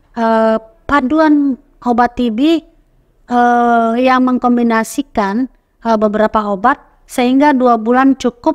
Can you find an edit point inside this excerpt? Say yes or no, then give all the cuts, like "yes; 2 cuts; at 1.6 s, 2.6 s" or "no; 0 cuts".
no; 0 cuts